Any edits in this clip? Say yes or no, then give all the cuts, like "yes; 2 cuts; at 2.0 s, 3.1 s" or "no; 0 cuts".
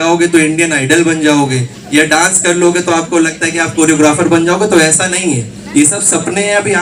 no; 0 cuts